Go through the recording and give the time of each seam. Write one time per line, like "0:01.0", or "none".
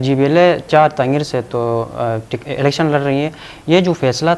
none